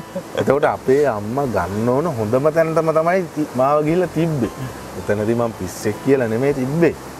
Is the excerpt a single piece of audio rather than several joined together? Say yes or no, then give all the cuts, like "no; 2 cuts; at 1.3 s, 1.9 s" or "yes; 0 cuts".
yes; 0 cuts